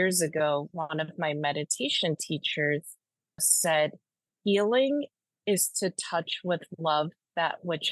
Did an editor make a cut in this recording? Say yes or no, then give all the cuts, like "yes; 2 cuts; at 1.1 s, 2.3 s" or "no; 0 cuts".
yes; 1 cut; at 3.5 s